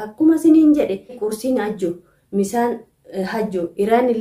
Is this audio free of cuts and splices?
no; 1 cut; at 1.2 s

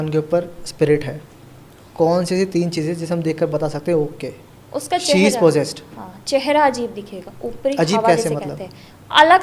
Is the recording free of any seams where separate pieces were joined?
yes; 0 cuts

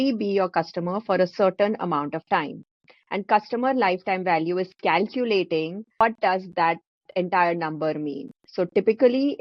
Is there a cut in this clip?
yes; 1 cut; at 6.0 s

